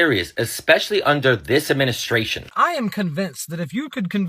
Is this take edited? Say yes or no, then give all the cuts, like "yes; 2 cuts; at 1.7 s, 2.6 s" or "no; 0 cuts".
yes; 1 cut; at 2.5 s